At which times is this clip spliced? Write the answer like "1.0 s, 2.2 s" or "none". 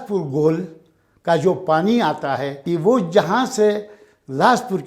2.6 s